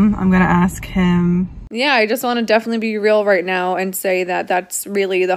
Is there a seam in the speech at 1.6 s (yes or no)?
yes